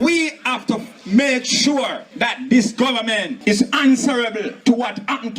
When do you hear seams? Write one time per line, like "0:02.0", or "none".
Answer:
0:00.9
0:02.0
0:03.3
0:04.5